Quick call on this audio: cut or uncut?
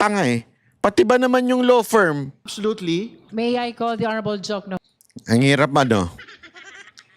cut